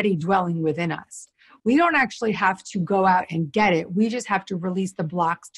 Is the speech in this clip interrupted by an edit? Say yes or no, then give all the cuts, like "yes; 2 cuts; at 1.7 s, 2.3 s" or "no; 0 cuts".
no; 0 cuts